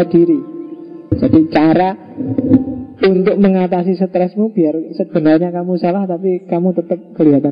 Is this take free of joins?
no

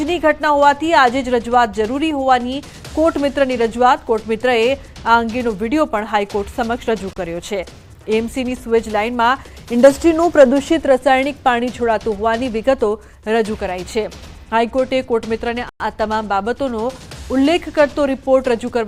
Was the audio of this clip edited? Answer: no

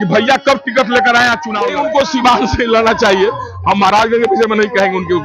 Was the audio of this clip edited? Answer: yes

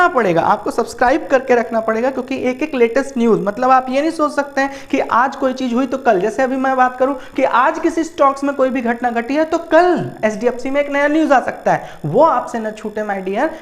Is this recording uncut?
yes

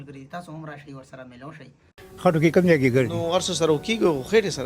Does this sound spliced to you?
yes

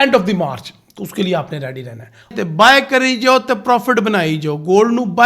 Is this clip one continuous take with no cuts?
no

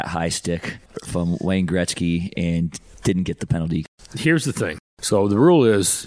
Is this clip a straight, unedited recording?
no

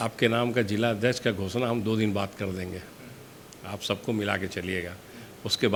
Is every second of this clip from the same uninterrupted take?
yes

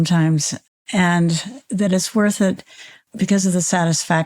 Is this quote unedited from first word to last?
no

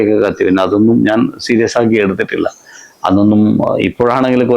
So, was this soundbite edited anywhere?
no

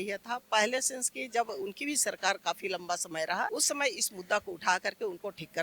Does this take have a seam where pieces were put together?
yes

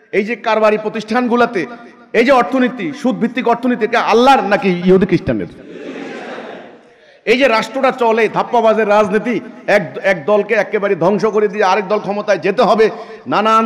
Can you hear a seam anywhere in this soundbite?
no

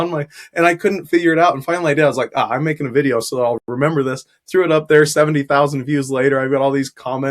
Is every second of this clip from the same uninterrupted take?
yes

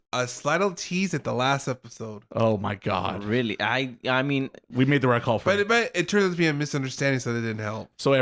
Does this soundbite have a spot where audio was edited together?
no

